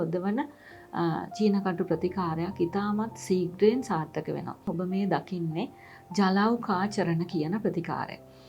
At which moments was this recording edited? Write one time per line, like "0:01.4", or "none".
0:04.7